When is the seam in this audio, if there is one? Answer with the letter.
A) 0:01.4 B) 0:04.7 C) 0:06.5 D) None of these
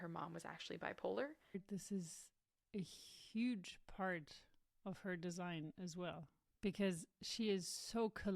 A